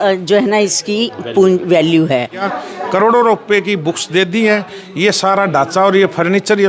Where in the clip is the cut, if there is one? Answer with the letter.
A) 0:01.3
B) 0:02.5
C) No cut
B